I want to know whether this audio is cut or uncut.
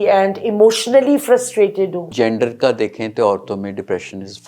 cut